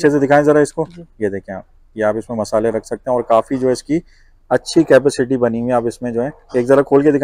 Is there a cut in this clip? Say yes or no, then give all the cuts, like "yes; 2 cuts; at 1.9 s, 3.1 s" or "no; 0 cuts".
no; 0 cuts